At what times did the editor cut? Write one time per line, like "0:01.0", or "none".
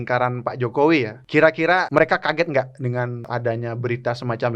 0:01.7
0:03.2